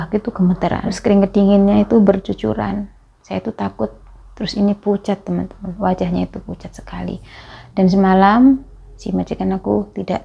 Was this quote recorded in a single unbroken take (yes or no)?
no